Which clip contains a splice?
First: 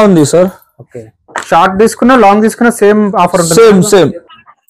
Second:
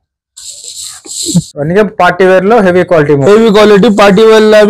second; 1 cut; at 1.5 s

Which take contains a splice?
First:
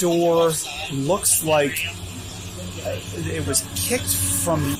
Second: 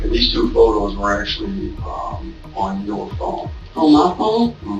second; 1 cut; at 3.6 s

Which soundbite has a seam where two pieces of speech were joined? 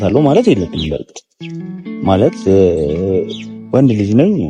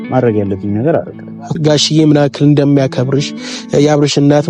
second; 1 cut; at 1.5 s

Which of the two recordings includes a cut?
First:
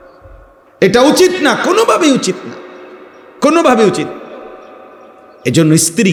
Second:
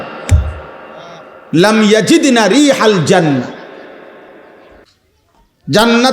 second; 1 cut; at 4.8 s

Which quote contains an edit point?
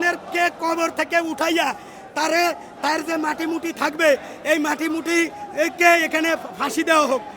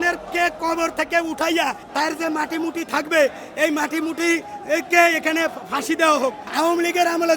second; 2 cuts; at 1.8 s, 6.4 s

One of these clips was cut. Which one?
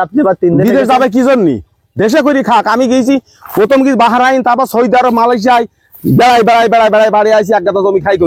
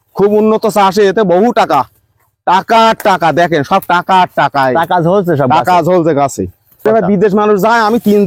second; 1 cut; at 6.8 s

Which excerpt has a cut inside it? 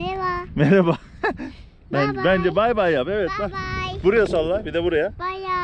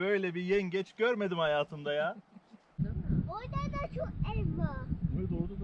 second; 1 cut; at 2.7 s

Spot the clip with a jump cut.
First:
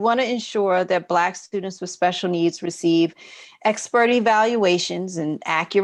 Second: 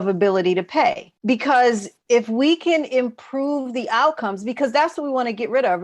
second; 2 cuts; at 1.1 s, 1.9 s

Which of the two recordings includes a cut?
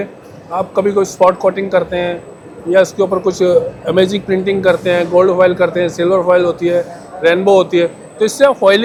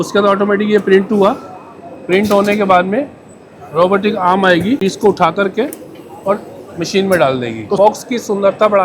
second; 2 cuts; at 4.8 s, 7.8 s

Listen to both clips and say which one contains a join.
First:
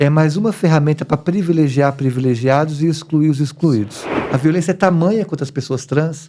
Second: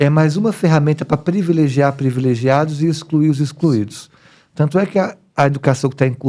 first; 1 cut; at 4.1 s

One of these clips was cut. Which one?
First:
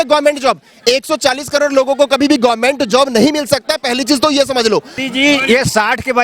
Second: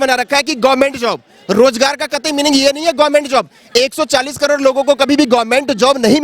first; 1 cut; at 5.0 s

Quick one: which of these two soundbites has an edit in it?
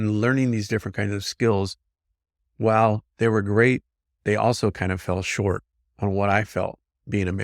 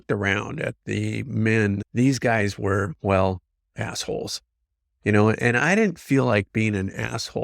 second; 1 cut; at 1.9 s

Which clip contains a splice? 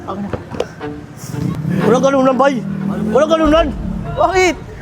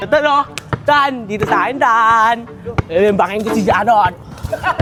first; 1 cut; at 1.6 s

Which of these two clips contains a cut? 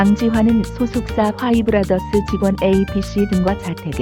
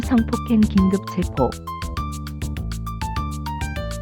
second; 1 cut; at 1.6 s

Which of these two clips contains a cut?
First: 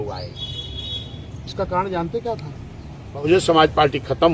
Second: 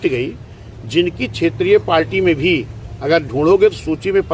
first; 1 cut; at 3.3 s

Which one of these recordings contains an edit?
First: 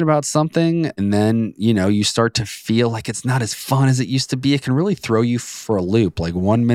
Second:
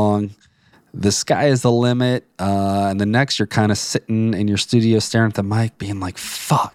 first; 1 cut; at 0.9 s

